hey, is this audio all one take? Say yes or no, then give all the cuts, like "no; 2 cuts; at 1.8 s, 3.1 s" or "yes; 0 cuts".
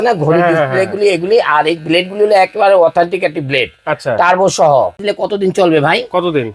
no; 1 cut; at 5.0 s